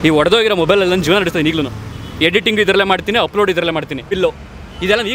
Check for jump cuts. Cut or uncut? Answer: cut